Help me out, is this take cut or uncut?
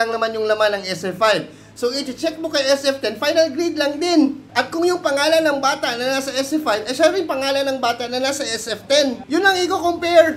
cut